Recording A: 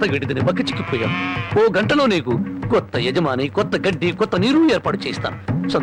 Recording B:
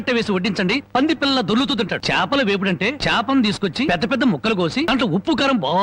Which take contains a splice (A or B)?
B